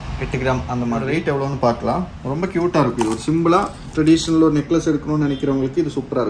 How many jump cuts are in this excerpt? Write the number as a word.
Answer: one